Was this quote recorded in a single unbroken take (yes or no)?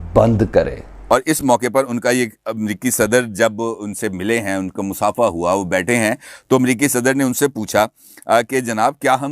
no